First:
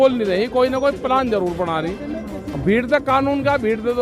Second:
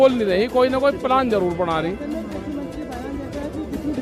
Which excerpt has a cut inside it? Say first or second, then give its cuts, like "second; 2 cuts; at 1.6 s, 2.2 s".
first; 1 cut; at 2.5 s